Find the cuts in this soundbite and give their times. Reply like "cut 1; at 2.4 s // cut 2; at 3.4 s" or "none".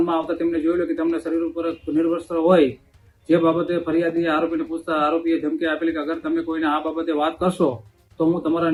none